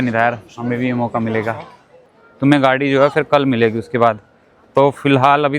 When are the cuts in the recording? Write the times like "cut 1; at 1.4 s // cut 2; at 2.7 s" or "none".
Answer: cut 1; at 1.9 s